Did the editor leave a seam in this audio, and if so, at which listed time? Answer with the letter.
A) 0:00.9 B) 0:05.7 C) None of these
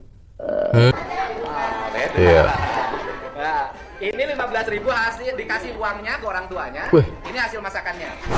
A